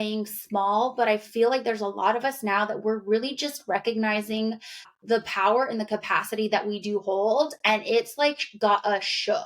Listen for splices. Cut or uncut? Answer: cut